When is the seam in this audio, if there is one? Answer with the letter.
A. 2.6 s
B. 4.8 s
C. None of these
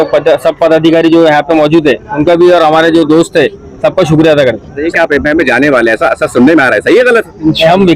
B